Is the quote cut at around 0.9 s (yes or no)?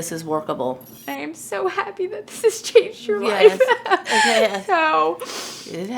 yes